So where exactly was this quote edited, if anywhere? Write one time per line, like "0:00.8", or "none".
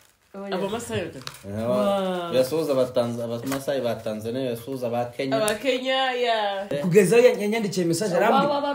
0:06.7